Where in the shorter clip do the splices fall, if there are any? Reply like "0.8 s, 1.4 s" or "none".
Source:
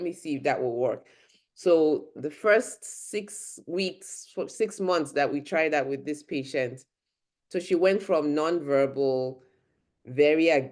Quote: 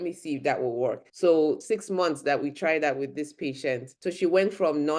1.1 s, 1.6 s, 3.9 s